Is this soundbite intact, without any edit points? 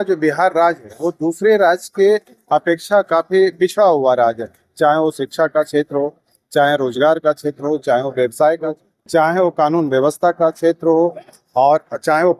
no; 1 cut; at 8.7 s

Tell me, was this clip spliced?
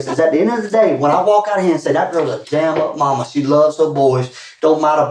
no; 0 cuts

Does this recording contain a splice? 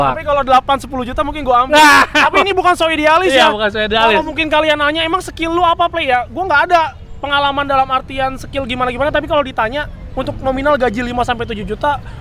no; 0 cuts

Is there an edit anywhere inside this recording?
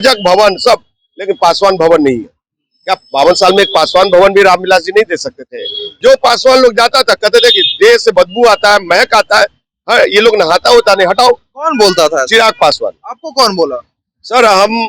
yes; 1 cut; at 6.0 s

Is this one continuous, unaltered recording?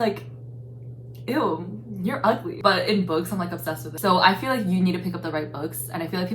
no; 2 cuts; at 2.5 s, 3.9 s

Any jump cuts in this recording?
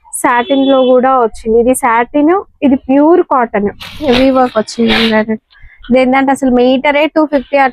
yes; 1 cut; at 4.0 s

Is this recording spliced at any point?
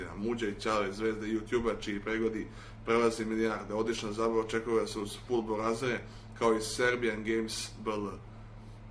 yes; 1 cut; at 1.0 s

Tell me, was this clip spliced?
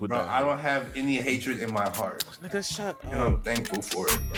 no; 0 cuts

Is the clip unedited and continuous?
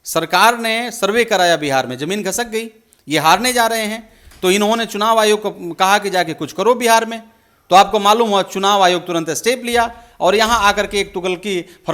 yes; 0 cuts

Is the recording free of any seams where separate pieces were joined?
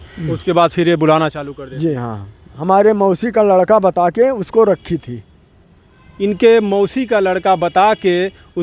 no; 1 cut; at 2.5 s

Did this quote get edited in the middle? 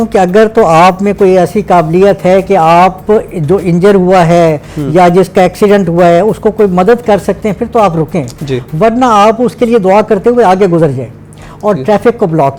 no; 0 cuts

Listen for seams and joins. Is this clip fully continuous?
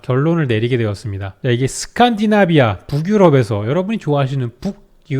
no; 1 cut; at 1.4 s

